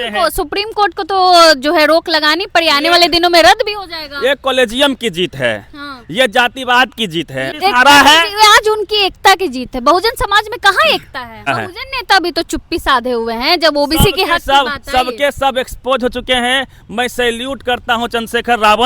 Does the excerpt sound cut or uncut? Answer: cut